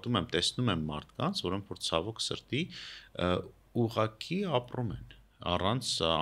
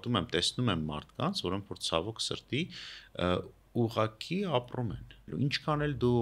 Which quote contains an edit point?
second; 1 cut; at 5.2 s

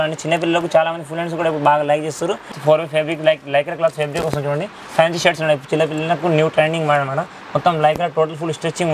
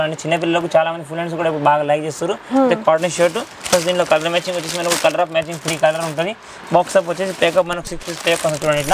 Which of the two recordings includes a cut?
first; 1 cut; at 2.5 s

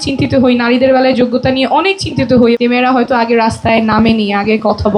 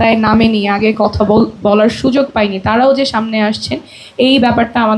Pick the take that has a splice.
first; 1 cut; at 2.6 s

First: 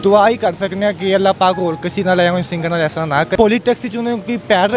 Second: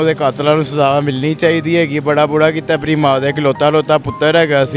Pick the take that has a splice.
first; 1 cut; at 3.3 s

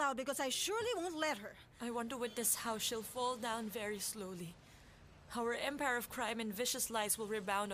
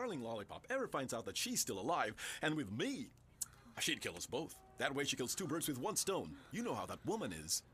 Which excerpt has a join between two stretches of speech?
second; 1 cut; at 6.0 s

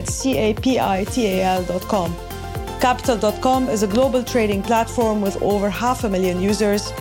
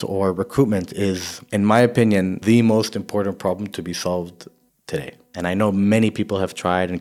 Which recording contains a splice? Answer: second; 3 cuts; at 1.3 s, 2.4 s, 4.9 s

